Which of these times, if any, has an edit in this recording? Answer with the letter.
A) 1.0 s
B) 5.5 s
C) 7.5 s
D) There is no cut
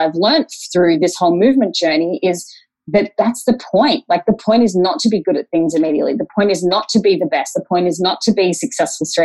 A